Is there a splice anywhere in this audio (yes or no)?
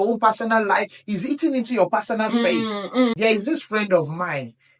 yes